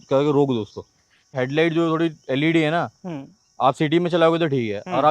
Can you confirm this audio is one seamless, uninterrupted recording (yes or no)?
no